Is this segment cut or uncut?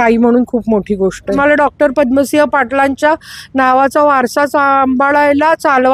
cut